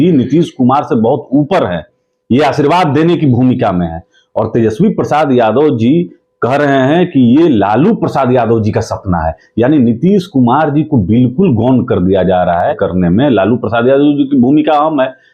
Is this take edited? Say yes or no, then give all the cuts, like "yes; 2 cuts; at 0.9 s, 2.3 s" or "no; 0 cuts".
yes; 1 cut; at 12.8 s